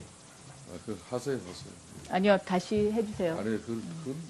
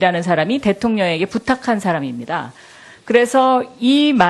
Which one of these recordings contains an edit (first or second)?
second